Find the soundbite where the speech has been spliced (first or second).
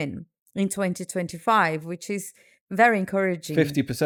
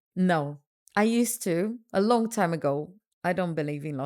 second